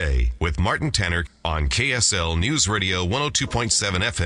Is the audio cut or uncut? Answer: cut